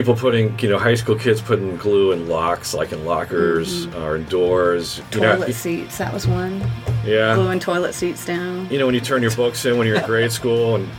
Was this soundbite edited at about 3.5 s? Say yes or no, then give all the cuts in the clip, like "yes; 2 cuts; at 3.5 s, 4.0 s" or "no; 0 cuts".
no; 1 cut; at 5.0 s